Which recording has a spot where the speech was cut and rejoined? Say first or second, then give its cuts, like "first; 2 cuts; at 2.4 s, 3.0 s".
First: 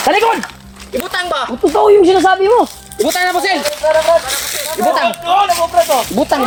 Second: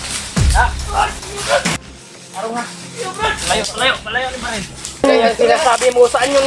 second; 1 cut; at 5.0 s